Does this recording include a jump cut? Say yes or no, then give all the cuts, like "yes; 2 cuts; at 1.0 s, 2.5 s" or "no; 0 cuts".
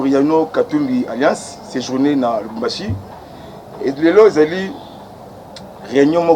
no; 0 cuts